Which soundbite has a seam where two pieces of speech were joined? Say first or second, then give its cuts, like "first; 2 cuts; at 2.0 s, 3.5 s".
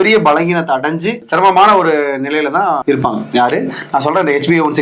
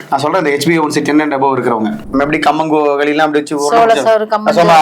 second; 1 cut; at 2.0 s